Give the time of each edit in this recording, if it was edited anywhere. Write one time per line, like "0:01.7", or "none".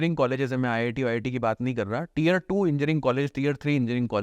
none

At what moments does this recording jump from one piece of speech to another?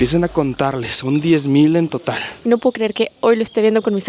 0:02.4

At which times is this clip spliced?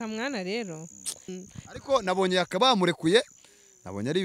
0:01.3

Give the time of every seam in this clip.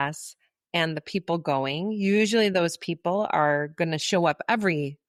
none

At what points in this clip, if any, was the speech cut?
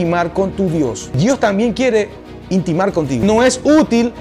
0:01.2
0:03.2

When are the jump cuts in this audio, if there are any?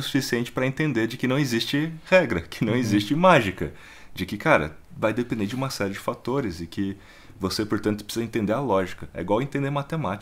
none

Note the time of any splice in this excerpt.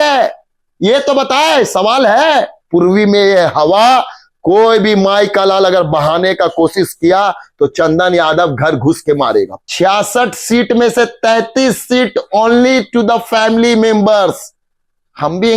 0:02.6
0:09.6

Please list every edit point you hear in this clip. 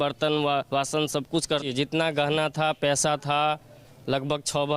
0:01.6

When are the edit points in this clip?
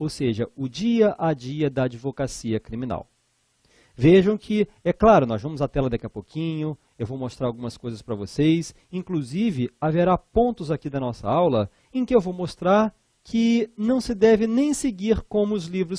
0:10.9

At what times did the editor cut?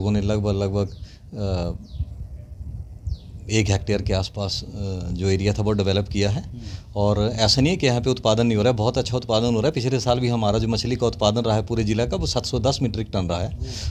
none

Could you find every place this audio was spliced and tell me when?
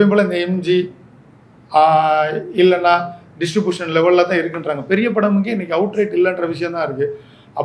none

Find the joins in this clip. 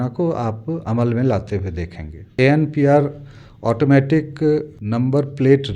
0:02.4
0:04.8

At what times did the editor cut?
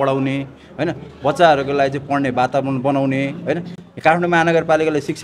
none

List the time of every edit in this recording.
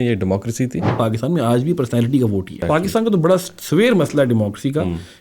0:00.9
0:02.6

